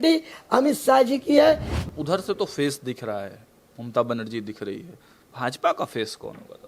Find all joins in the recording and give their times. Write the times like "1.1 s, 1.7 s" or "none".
1.7 s

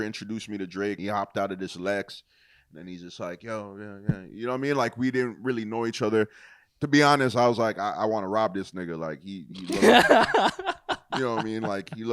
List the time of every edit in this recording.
1.0 s

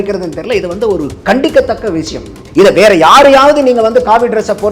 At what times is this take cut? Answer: 2.4 s

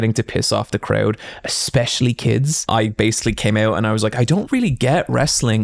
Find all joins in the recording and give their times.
2.6 s

